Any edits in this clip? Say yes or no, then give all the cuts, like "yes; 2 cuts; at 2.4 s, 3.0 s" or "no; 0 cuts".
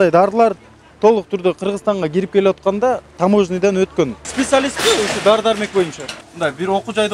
yes; 2 cuts; at 4.2 s, 6.2 s